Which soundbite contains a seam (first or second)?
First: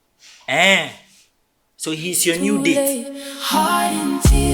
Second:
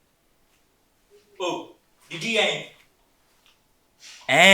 first